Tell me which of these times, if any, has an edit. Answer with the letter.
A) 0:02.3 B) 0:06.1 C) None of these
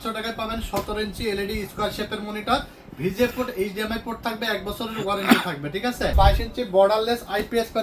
B